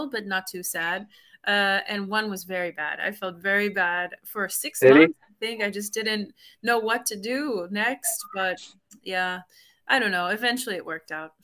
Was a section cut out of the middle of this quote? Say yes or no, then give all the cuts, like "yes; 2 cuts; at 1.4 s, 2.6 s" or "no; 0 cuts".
no; 0 cuts